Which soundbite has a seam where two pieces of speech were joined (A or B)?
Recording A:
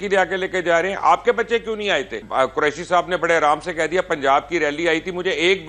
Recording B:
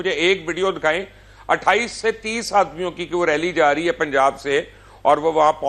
A